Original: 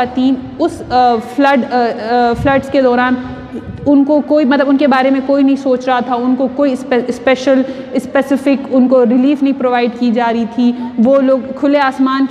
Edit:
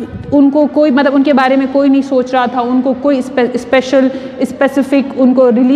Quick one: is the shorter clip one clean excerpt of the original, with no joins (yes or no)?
yes